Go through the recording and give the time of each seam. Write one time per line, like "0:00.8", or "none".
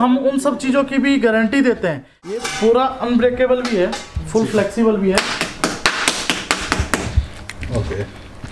0:02.4